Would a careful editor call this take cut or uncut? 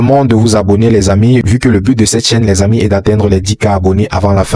uncut